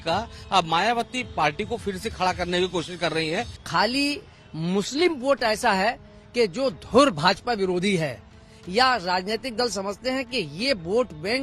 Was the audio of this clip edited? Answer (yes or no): yes